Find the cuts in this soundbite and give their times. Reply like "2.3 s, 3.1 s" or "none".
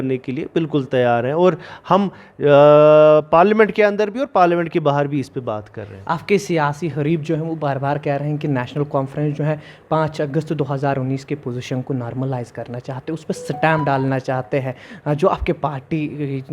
none